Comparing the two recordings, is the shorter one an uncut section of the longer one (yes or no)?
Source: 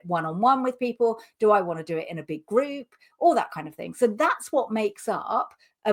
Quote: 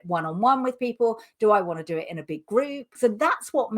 no